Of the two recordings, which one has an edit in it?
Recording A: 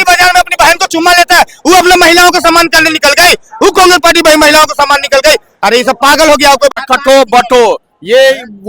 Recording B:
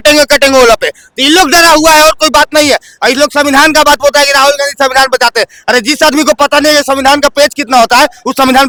A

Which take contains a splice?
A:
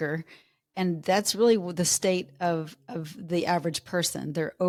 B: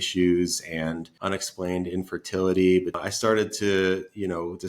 B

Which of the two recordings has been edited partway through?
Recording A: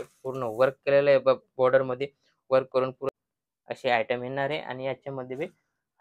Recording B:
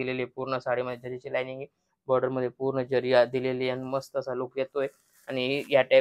A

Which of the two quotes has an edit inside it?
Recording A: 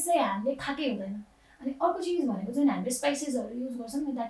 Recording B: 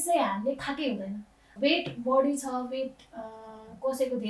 B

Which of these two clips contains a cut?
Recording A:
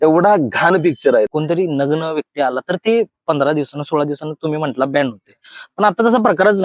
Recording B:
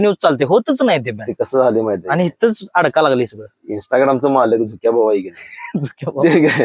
A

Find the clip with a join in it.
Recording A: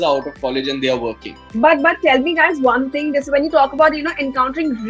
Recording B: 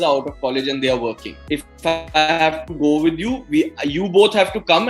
B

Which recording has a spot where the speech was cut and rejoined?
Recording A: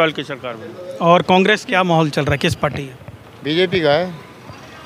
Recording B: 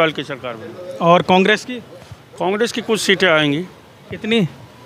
A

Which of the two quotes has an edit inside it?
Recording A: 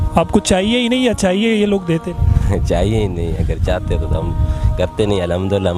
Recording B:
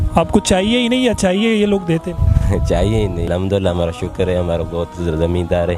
B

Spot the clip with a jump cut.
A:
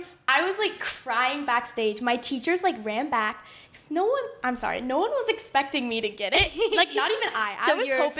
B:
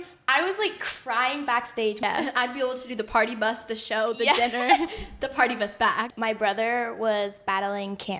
B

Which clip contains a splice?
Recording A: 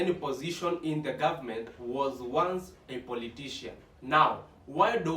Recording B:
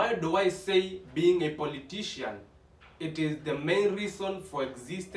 A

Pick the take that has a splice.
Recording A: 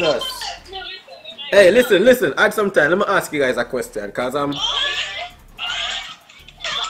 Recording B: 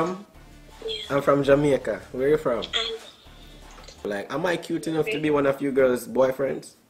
B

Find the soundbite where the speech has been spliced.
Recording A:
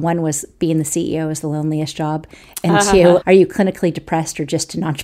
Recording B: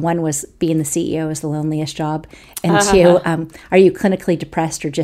A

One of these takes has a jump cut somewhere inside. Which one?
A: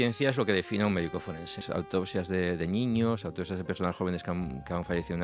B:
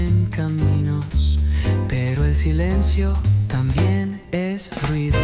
A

